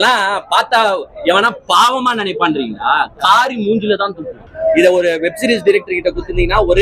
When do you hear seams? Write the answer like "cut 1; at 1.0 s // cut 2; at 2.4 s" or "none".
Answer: cut 1; at 4.3 s